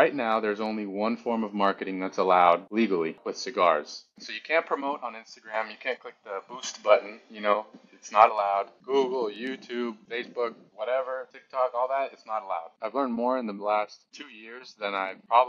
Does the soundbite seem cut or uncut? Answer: cut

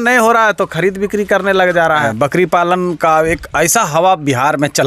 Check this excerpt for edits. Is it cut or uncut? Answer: cut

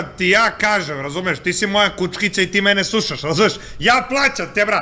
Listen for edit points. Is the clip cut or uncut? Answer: uncut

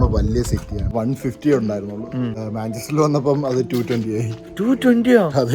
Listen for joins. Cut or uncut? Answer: cut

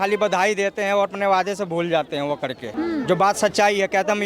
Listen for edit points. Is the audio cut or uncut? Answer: cut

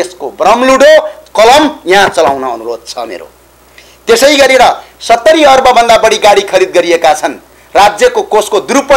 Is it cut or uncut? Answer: uncut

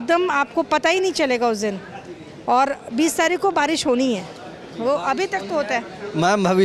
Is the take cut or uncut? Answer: uncut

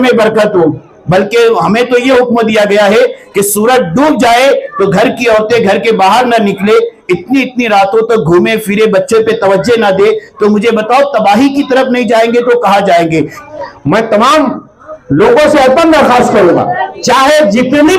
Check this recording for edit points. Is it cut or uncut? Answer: cut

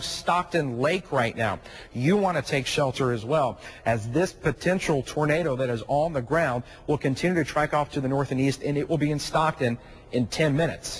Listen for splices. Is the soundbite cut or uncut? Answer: uncut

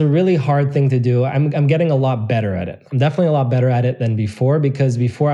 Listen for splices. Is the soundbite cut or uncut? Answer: uncut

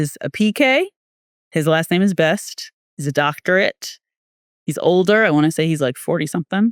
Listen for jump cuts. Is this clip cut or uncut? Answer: uncut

